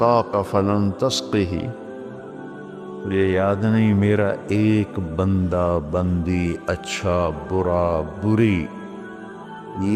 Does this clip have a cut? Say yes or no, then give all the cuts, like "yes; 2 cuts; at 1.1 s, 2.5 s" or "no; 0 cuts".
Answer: yes; 2 cuts; at 1.7 s, 3.0 s